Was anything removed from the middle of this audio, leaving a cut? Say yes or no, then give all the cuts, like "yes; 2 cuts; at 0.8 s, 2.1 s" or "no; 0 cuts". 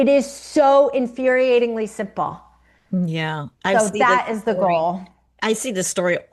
no; 0 cuts